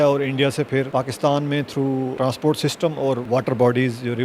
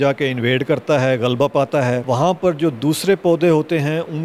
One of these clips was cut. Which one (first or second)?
first